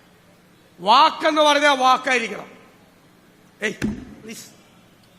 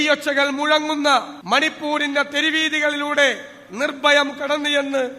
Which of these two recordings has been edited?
second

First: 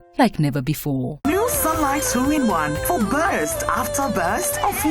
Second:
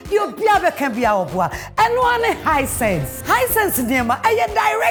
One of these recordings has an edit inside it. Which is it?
first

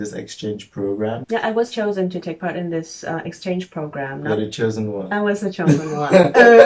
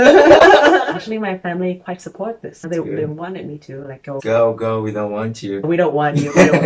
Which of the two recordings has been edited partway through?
second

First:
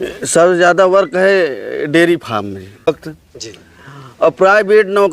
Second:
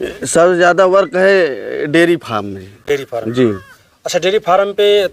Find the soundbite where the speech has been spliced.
first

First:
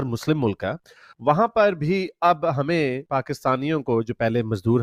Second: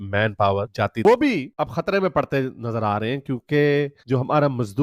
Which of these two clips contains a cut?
second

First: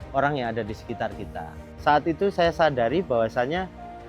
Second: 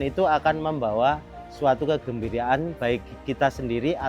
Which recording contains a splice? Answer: first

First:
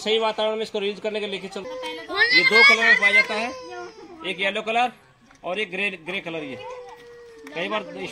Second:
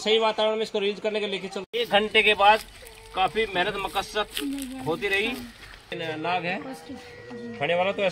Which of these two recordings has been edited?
second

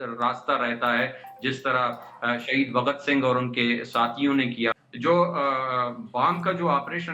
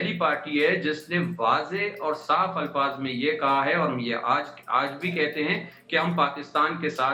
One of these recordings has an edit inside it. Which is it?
first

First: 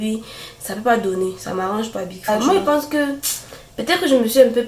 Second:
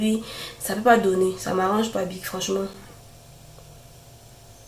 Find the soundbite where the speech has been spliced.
first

